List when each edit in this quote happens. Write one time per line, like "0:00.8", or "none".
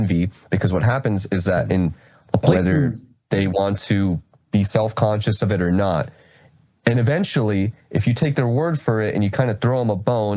0:02.5